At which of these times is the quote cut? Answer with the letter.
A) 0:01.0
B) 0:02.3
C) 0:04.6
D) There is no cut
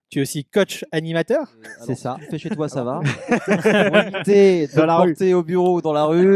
B